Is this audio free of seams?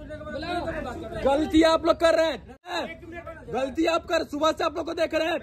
no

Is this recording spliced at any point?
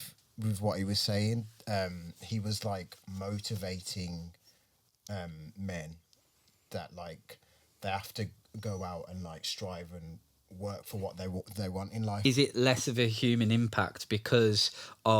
yes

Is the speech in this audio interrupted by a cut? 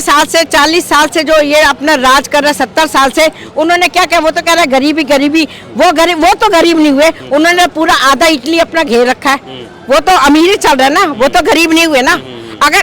no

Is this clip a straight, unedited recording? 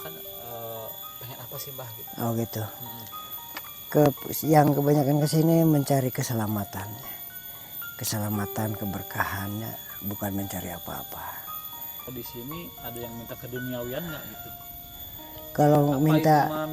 no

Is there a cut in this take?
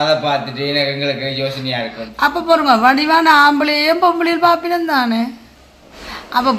no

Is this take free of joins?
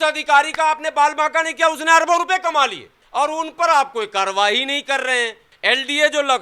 no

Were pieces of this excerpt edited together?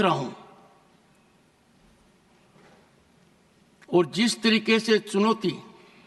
no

